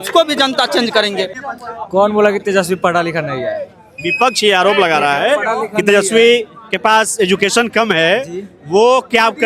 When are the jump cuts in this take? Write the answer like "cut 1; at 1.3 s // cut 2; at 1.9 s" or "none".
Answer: cut 1; at 1.4 s